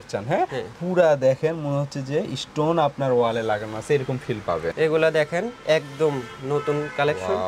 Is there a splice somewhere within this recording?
yes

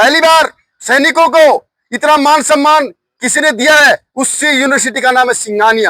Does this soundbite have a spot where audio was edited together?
no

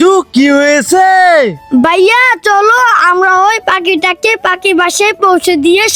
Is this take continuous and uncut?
yes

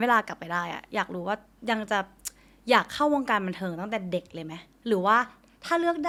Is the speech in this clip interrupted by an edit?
no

